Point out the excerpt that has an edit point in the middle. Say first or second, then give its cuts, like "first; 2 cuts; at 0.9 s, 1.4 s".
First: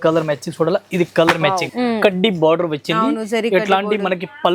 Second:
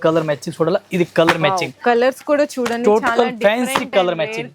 first; 1 cut; at 1.7 s